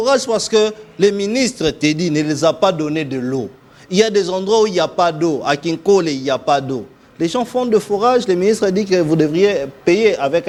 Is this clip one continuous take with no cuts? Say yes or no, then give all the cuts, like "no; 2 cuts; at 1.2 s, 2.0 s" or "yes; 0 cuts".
yes; 0 cuts